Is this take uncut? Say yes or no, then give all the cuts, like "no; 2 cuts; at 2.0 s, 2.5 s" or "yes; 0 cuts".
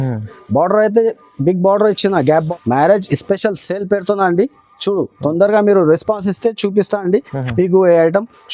no; 1 cut; at 2.5 s